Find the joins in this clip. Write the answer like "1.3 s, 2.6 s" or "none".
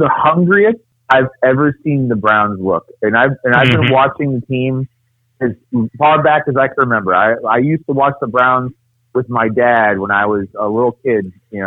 0.9 s

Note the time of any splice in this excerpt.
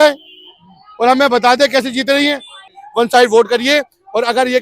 2.8 s

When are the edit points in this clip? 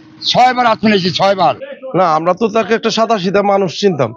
1.6 s

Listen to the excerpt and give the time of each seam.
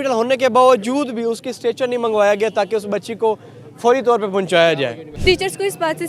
5.0 s

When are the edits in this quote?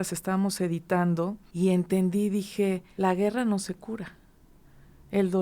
1.4 s, 2.9 s

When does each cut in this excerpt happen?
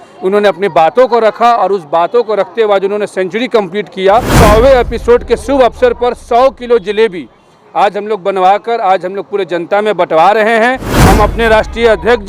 4.3 s, 10.9 s

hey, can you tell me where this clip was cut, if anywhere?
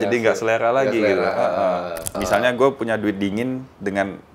2.1 s

